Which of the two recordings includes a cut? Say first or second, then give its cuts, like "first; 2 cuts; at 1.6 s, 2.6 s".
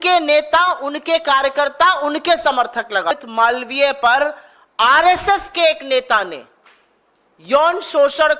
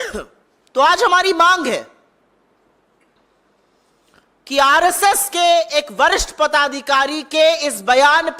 first; 1 cut; at 3.1 s